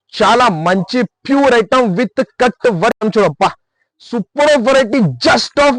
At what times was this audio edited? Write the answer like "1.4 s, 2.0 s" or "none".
3.0 s

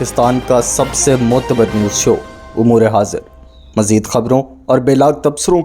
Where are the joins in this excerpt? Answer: none

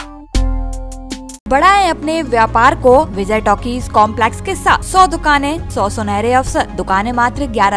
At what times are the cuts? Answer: 1.5 s, 3.2 s, 4.8 s, 5.6 s, 6.8 s

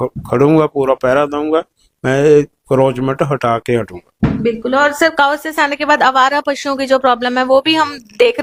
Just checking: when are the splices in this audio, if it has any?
none

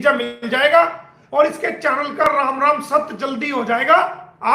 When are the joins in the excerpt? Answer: 1.1 s

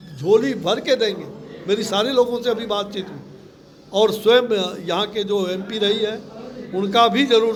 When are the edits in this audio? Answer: none

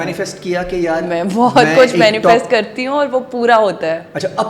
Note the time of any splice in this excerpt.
none

